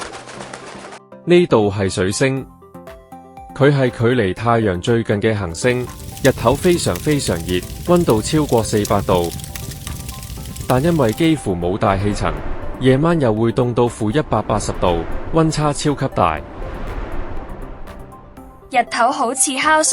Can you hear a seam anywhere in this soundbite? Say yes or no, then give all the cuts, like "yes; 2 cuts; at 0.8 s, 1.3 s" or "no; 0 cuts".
yes; 1 cut; at 1.0 s